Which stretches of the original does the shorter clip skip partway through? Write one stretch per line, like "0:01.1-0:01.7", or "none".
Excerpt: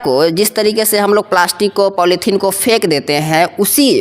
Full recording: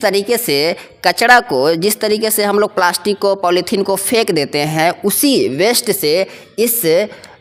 none